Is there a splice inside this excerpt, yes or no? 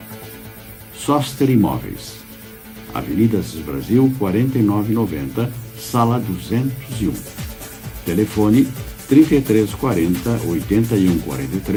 no